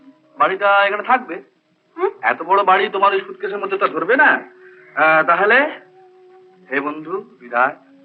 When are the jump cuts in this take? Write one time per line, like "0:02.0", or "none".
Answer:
none